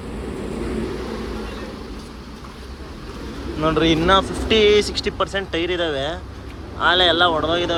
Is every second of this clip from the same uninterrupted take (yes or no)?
yes